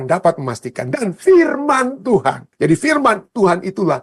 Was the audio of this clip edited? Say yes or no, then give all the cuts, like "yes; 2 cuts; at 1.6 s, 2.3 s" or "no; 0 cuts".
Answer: yes; 1 cut; at 2.5 s